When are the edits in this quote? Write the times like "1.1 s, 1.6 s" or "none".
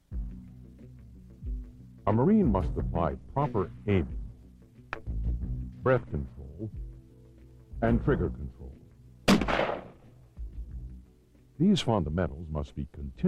1.4 s